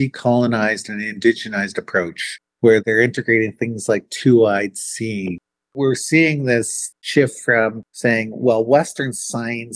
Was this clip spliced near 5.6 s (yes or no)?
yes